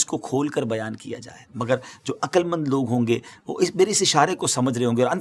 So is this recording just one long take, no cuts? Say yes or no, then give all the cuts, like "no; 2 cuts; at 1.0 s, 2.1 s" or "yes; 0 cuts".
yes; 0 cuts